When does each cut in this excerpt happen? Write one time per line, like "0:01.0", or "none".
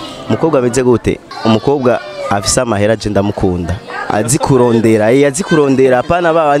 0:01.3